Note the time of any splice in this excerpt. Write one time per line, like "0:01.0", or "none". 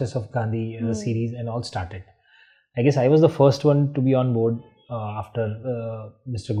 none